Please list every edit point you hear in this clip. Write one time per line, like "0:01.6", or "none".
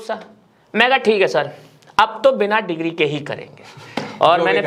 none

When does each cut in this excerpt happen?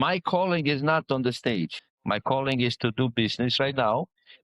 0:01.8

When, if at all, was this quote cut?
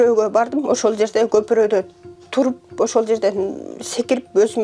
none

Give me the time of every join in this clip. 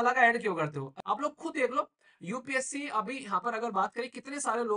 0:00.9

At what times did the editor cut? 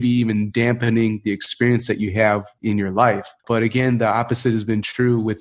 0:02.5
0:03.4

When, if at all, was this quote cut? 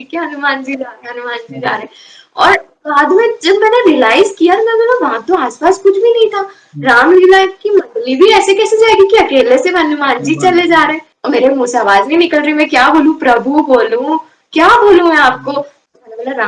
0:11.1

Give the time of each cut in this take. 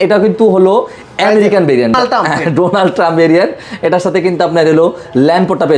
none

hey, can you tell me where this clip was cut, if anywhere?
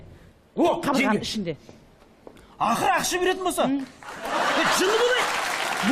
none

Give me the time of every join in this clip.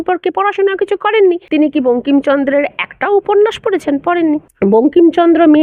0:01.4
0:04.5

